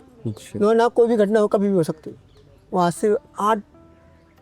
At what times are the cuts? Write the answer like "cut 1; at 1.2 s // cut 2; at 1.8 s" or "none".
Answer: cut 1; at 2.5 s